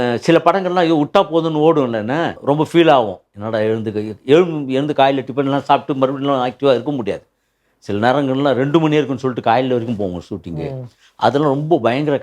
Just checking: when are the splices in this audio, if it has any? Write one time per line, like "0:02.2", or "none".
0:02.4